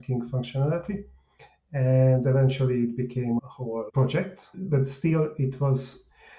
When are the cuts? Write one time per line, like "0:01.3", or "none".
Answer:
0:03.4
0:04.6